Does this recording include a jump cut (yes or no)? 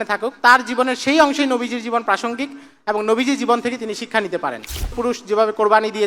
yes